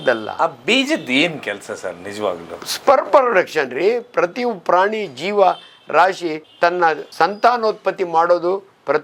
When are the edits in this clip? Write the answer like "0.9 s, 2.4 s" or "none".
none